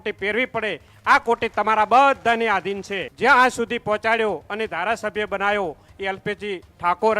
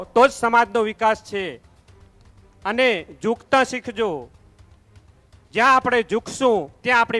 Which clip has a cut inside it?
first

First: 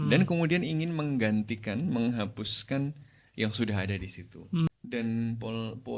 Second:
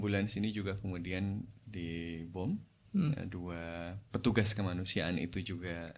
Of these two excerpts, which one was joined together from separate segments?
first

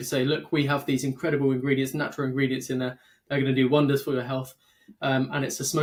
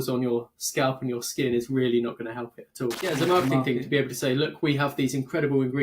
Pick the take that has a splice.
second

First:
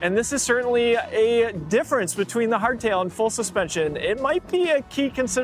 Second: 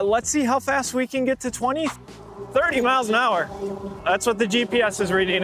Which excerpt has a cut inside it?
second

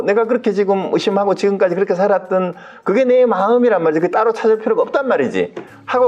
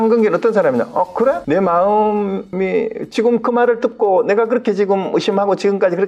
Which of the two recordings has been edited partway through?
second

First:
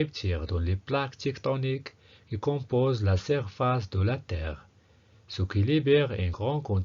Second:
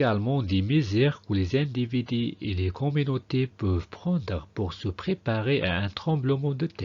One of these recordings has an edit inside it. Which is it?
second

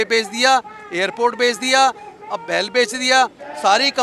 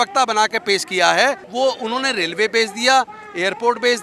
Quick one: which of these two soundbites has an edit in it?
second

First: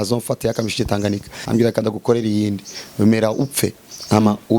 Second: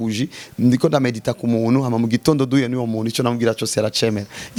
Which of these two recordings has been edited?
first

